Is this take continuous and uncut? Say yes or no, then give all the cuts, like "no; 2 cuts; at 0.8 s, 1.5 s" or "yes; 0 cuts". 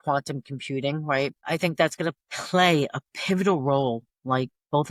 yes; 0 cuts